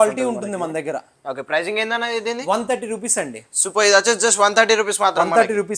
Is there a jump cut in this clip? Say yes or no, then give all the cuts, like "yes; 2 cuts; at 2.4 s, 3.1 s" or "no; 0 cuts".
no; 0 cuts